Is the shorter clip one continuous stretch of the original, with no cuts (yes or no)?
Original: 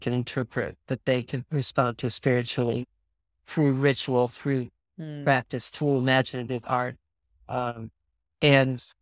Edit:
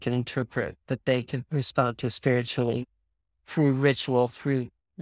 yes